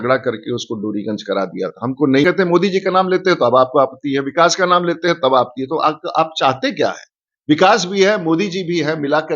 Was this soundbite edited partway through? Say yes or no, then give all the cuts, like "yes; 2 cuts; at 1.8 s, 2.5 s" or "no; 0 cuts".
yes; 1 cut; at 2.2 s